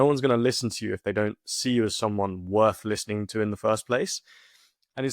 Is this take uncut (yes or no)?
yes